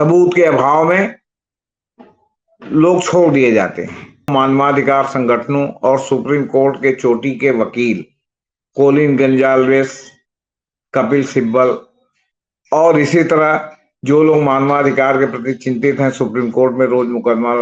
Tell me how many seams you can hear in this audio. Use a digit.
1